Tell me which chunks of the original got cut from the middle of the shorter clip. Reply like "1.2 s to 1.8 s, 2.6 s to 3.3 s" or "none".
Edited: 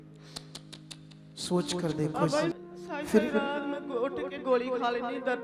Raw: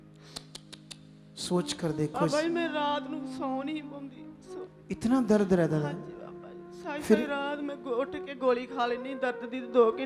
2.5 s to 6.5 s